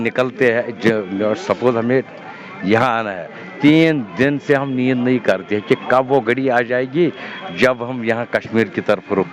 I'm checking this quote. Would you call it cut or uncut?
uncut